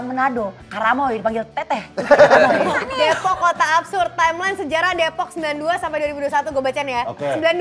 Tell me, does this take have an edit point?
yes; 1 cut; at 2.8 s

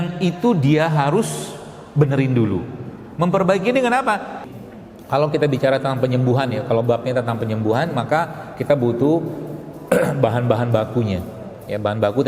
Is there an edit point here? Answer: yes; 1 cut; at 4.4 s

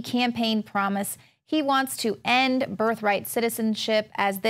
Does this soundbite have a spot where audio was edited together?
yes; 1 cut; at 3.4 s

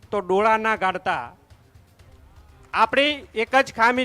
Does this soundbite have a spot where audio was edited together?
no; 0 cuts

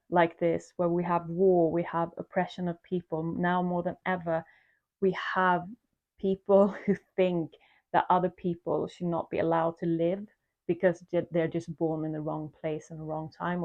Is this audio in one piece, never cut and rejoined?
yes; 0 cuts

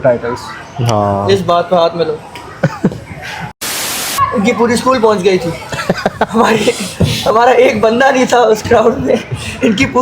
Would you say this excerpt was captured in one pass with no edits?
no; 1 cut; at 3.7 s

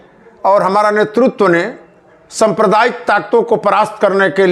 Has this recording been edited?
no; 0 cuts

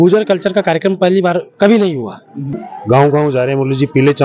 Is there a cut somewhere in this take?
yes; 1 cut; at 2.7 s

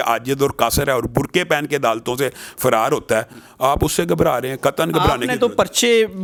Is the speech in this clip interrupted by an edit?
no; 0 cuts

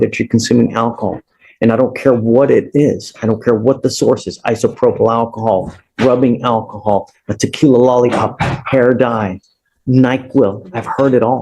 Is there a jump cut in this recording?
no; 0 cuts

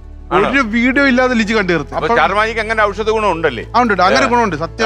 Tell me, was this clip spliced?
yes; 1 cut; at 1.9 s

